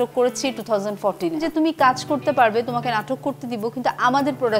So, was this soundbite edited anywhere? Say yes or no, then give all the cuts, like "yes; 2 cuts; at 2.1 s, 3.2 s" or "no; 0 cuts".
yes; 1 cut; at 1.4 s